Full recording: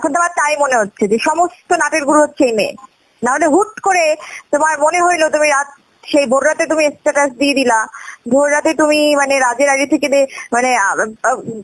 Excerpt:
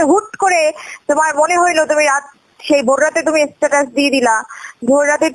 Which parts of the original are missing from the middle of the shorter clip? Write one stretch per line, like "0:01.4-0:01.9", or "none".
none